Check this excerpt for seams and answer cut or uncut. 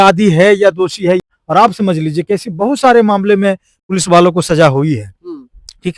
cut